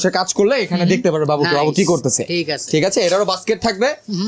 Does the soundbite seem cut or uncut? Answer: uncut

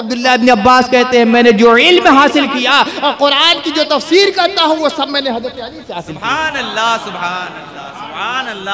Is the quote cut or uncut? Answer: uncut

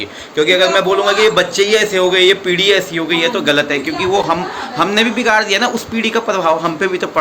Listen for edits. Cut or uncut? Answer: uncut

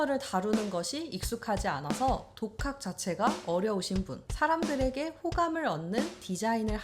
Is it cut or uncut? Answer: cut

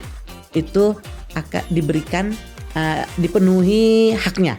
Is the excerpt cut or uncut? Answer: uncut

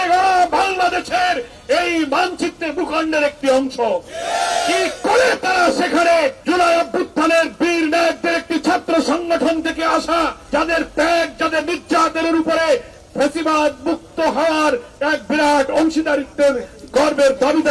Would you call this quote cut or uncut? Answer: cut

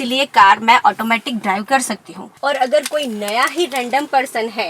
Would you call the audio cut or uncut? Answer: cut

